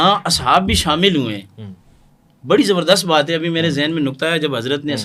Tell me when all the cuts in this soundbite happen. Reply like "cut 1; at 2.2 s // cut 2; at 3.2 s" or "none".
none